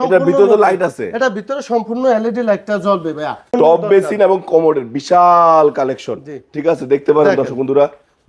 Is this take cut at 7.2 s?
no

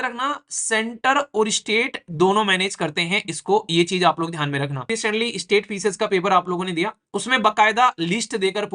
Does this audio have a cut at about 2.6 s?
no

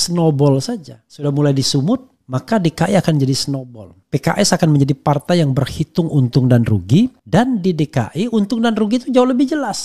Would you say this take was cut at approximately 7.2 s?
yes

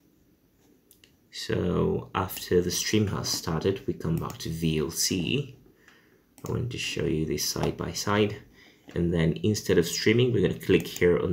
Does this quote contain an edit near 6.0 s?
no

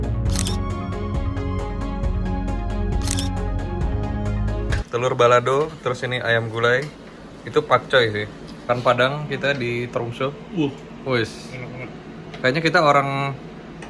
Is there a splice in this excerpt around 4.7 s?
yes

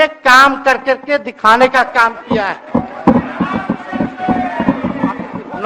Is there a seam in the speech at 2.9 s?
no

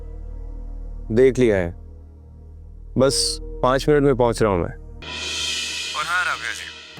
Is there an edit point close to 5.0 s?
yes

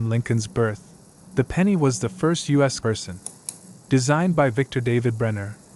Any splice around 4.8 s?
no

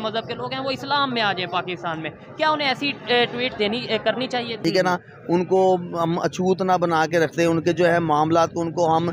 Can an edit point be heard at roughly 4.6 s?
yes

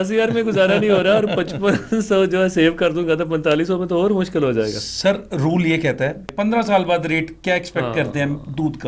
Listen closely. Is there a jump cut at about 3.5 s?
no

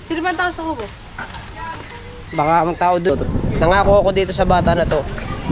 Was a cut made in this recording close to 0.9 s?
no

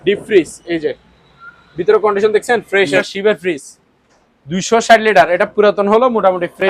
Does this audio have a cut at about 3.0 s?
yes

